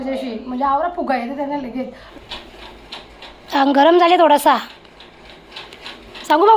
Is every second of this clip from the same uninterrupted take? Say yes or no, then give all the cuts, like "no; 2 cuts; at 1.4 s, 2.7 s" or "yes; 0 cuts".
no; 1 cut; at 2.0 s